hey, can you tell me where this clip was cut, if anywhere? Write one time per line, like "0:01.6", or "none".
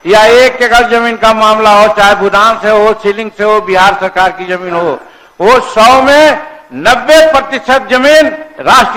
none